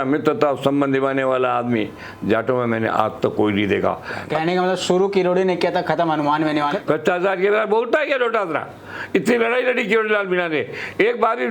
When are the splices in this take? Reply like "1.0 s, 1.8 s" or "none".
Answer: 4.2 s, 6.8 s